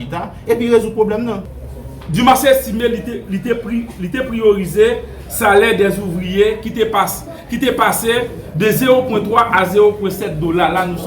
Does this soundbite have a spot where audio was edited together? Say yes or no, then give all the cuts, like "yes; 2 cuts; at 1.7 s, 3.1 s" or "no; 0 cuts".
yes; 1 cut; at 1.4 s